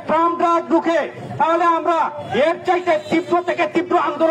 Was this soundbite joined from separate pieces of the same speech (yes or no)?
no